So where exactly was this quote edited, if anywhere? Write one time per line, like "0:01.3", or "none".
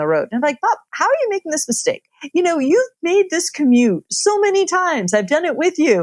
0:02.2